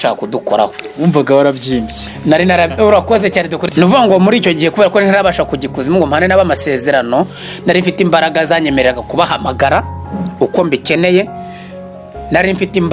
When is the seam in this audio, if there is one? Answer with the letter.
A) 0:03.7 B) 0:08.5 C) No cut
A